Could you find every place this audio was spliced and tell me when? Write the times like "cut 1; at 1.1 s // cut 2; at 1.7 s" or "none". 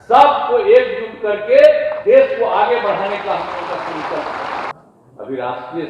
cut 1; at 4.7 s